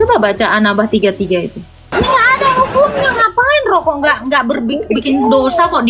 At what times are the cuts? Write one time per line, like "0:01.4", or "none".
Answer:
0:01.9